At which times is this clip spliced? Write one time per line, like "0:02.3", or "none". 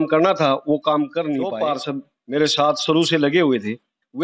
0:01.4